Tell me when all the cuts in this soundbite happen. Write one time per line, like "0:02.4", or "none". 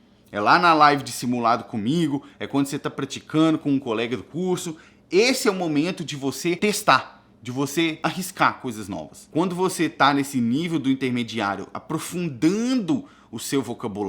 0:06.6
0:08.0
0:09.2